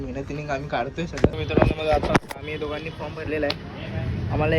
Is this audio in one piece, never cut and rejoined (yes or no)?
no